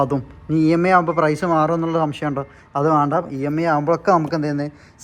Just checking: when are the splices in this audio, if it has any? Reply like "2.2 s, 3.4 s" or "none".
none